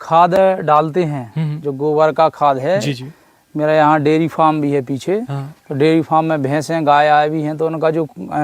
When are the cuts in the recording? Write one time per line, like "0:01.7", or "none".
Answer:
none

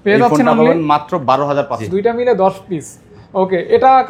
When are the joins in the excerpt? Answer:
0:01.8

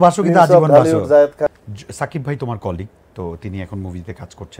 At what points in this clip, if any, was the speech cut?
0:01.5

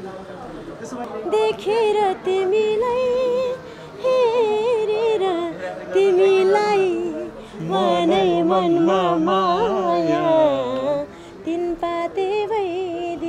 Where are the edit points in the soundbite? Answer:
0:01.0

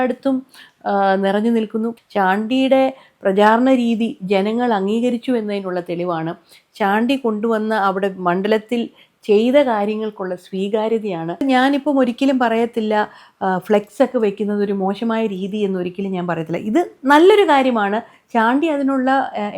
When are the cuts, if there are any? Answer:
0:01.9
0:11.4

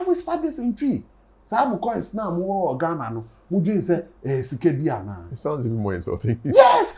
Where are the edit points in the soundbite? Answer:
none

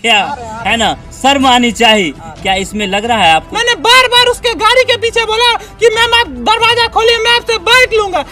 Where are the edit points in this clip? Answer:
0:03.5

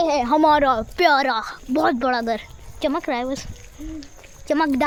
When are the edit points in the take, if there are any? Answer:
none

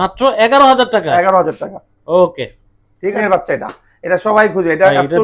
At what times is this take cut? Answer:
0:03.2

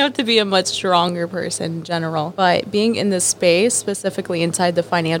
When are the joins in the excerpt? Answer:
0:02.3

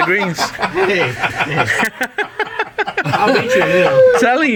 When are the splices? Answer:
none

